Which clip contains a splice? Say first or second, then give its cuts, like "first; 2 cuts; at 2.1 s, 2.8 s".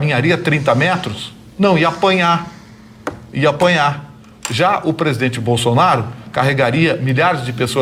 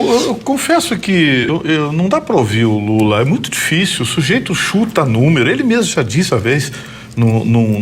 second; 1 cut; at 1.4 s